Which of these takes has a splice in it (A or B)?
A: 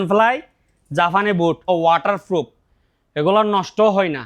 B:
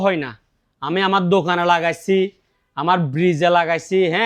A